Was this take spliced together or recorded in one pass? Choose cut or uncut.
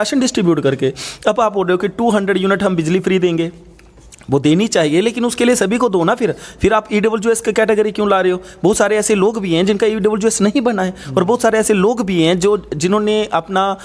uncut